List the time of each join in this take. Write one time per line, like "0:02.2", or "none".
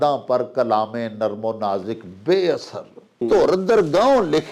0:03.2